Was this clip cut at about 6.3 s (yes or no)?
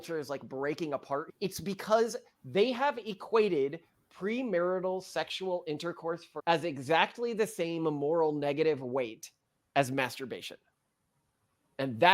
yes